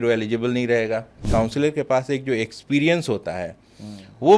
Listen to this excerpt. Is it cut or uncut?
cut